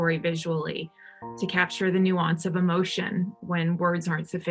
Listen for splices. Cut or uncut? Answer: cut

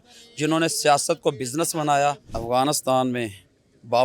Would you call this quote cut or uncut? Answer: cut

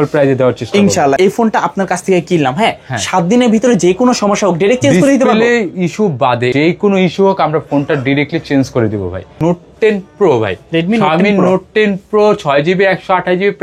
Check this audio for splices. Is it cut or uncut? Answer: cut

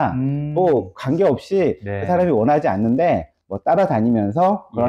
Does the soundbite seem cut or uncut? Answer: uncut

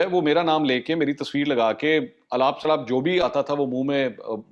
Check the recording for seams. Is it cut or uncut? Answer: uncut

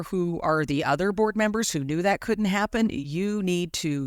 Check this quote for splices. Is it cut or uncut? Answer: uncut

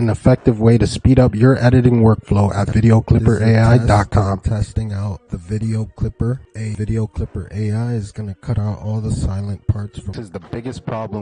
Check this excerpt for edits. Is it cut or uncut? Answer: cut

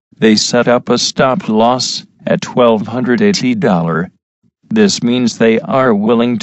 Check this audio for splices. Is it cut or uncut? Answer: uncut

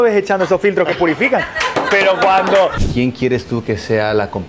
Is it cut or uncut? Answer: cut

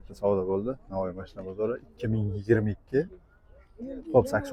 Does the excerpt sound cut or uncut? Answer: uncut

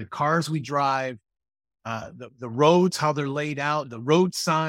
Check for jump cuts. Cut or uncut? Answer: uncut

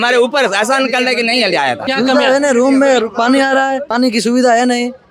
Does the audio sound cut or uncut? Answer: cut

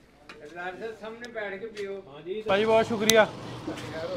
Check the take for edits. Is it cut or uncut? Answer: uncut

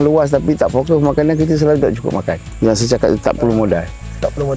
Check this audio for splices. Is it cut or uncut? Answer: cut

